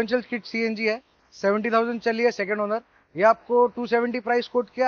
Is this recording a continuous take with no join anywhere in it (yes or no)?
yes